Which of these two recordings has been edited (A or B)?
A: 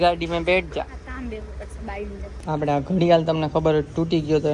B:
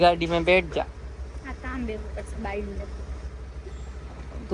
A